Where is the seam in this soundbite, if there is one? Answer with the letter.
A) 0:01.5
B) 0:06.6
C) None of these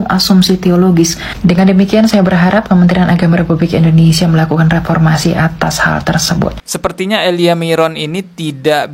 B